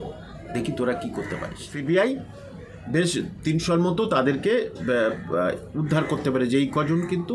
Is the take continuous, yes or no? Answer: no